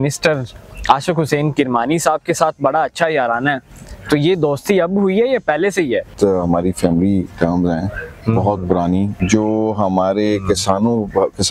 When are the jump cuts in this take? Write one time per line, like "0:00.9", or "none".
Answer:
0:06.1
0:09.2